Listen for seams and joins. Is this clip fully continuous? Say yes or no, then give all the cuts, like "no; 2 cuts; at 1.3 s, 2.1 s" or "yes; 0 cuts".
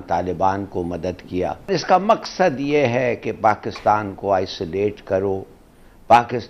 no; 1 cut; at 1.7 s